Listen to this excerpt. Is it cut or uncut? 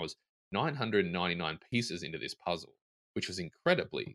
uncut